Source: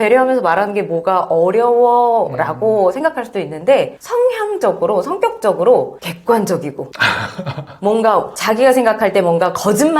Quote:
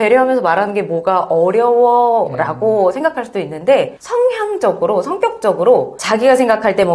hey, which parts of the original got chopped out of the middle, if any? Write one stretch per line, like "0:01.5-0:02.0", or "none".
0:06.0-0:08.3